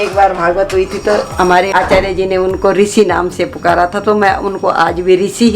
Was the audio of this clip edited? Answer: yes; 1 cut; at 1.7 s

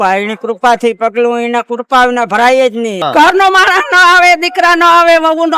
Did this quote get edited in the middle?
yes; 1 cut; at 3.0 s

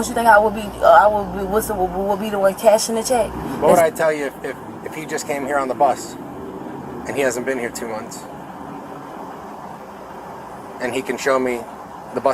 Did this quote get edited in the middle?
yes; 1 cut; at 3.4 s

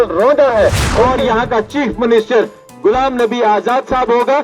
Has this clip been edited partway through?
yes; 1 cut; at 0.9 s

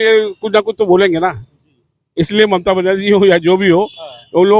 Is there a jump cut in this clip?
no; 0 cuts

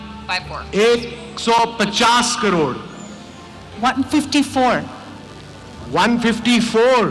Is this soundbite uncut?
yes; 0 cuts

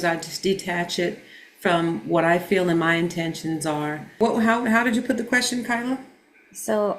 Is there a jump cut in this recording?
yes; 1 cut; at 4.2 s

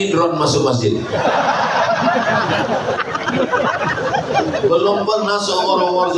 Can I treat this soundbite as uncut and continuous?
yes; 0 cuts

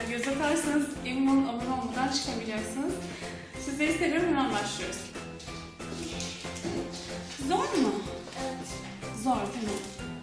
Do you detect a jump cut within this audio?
yes; 1 cut; at 1.1 s

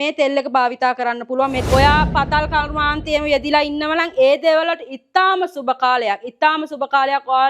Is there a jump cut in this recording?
yes; 1 cut; at 1.5 s

